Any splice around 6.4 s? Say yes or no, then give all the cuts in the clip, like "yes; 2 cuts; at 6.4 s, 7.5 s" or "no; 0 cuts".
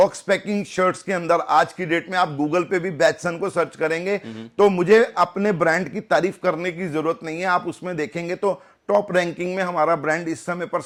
no; 0 cuts